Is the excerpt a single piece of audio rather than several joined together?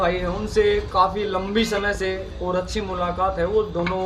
yes; 0 cuts

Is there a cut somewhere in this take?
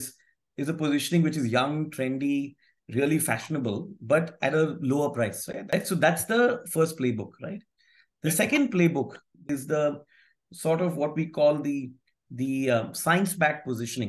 yes; 2 cuts; at 5.5 s, 9.5 s

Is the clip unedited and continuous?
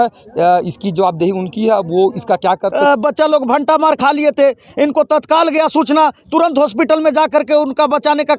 no; 1 cut; at 2.7 s

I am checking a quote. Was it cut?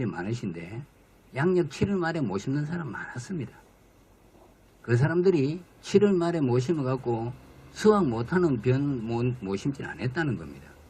yes; 1 cut; at 8.0 s

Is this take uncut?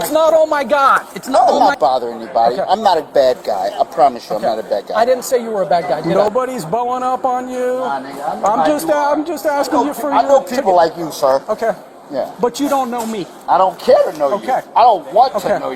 no; 2 cuts; at 1.6 s, 6.0 s

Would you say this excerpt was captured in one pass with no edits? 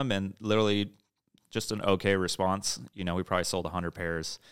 yes; 0 cuts

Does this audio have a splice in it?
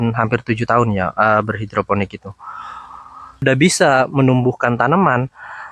yes; 1 cut; at 3.4 s

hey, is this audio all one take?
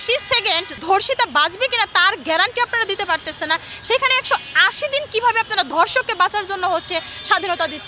yes; 0 cuts

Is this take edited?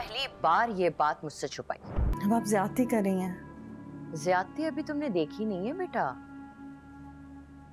yes; 1 cut; at 2.1 s

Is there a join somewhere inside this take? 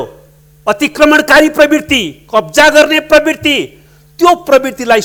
no; 0 cuts

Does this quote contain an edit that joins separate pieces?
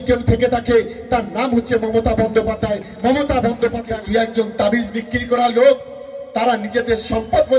yes; 1 cut; at 3.9 s

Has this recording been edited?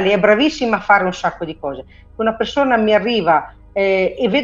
no; 0 cuts

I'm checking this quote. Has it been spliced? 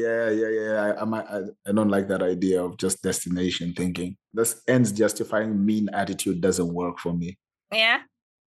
no; 0 cuts

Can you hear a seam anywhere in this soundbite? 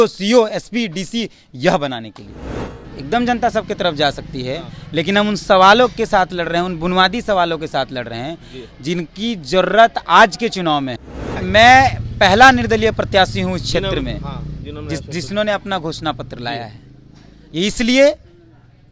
yes; 2 cuts; at 2.6 s, 11.3 s

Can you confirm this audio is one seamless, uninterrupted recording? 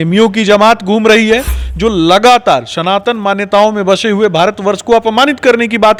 yes; 0 cuts

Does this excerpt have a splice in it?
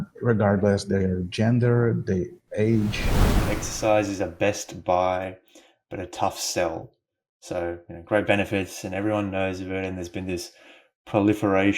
yes; 1 cut; at 3.4 s

